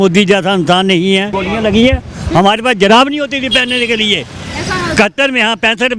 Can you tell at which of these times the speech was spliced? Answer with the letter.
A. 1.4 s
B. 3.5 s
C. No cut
A